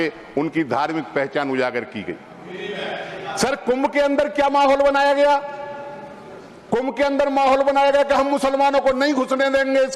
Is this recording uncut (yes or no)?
yes